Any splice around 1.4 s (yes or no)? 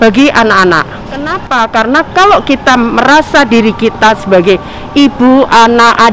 yes